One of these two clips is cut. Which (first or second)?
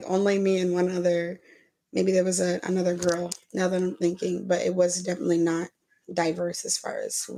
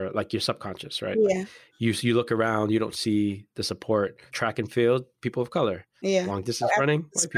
second